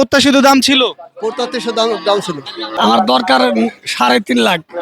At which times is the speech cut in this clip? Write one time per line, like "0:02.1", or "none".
0:02.7